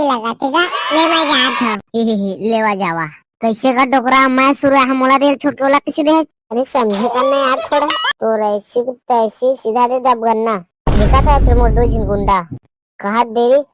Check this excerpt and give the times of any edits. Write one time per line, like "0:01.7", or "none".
0:08.0